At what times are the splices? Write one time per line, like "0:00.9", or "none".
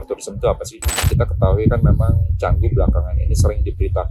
0:01.0